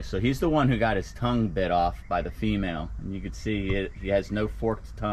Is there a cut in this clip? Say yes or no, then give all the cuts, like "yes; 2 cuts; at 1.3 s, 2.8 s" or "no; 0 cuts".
no; 0 cuts